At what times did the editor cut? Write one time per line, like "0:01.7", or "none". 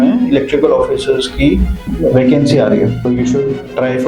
0:01.8
0:03.0